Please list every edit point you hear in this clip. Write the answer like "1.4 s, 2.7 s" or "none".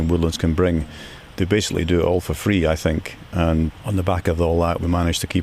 1.3 s, 3.7 s